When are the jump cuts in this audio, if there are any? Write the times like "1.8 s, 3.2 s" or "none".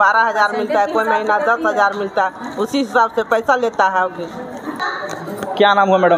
4.9 s

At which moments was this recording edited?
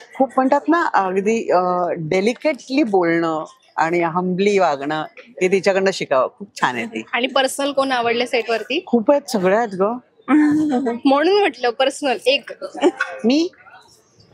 none

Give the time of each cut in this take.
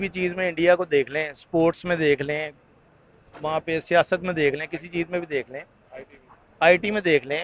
none

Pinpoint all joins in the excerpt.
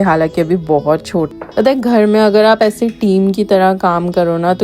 1.3 s

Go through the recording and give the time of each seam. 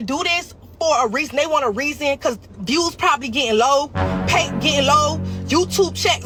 none

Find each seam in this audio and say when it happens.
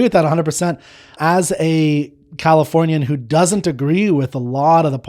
1.2 s

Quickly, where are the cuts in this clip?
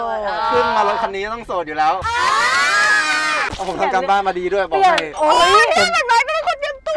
2.0 s, 3.5 s

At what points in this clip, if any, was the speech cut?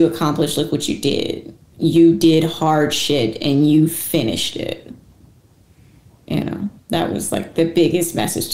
1.7 s

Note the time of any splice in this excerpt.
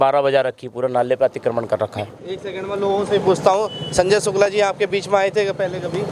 2.1 s

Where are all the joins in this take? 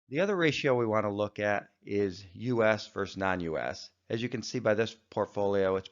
2.7 s

